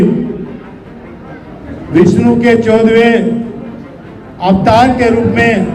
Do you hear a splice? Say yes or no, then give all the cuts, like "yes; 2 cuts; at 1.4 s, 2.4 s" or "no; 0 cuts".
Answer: no; 0 cuts